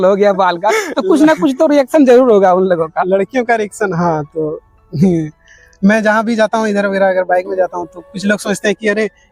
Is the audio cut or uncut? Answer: uncut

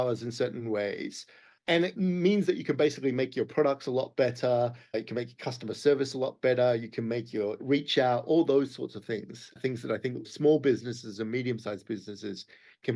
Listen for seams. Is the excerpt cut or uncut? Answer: cut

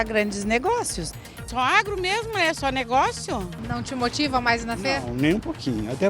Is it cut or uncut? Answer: cut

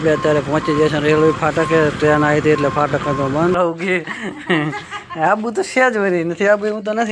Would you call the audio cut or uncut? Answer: cut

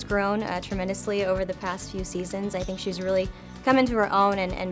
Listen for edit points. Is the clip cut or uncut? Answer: uncut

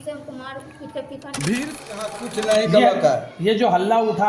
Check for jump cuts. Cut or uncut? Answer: cut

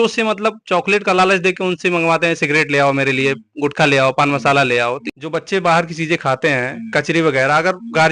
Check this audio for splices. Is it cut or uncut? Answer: cut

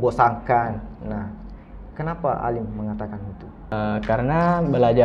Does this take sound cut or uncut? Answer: cut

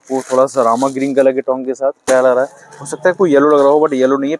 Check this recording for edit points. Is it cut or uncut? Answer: cut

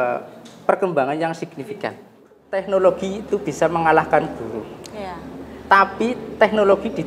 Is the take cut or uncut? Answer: cut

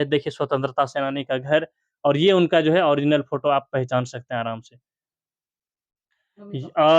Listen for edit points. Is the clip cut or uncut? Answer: uncut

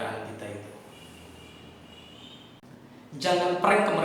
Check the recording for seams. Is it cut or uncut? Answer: cut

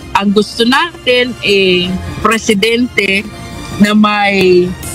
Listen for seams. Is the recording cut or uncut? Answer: uncut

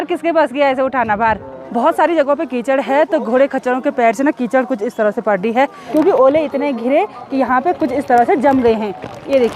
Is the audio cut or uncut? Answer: cut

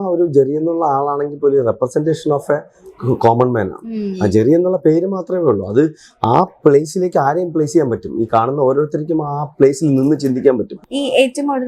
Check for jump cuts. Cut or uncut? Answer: cut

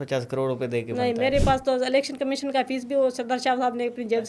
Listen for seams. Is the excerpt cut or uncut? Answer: uncut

